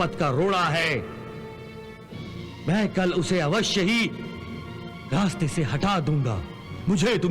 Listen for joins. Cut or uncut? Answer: uncut